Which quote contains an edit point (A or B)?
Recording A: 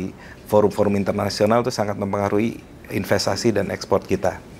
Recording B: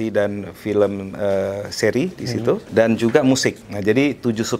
B